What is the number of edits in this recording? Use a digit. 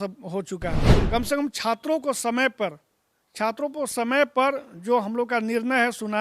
1